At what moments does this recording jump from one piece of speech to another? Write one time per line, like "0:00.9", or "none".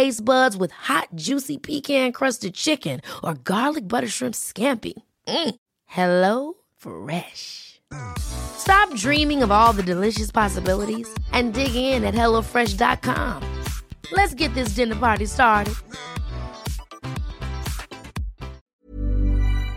0:18.7